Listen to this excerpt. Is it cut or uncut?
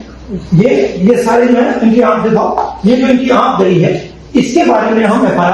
uncut